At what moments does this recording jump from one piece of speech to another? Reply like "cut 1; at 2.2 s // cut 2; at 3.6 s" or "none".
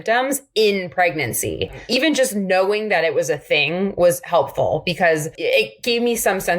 cut 1; at 1.9 s // cut 2; at 5.4 s